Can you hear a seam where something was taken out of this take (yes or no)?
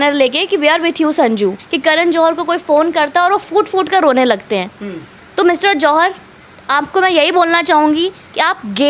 yes